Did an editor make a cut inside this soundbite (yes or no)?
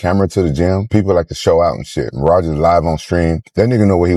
no